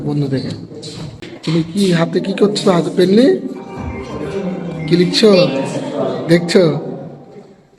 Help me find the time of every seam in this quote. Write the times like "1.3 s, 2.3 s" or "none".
1.3 s